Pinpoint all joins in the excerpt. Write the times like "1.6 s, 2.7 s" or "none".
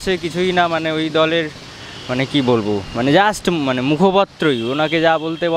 none